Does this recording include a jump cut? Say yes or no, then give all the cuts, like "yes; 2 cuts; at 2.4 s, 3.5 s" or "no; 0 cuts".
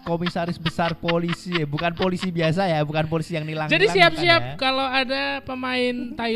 no; 0 cuts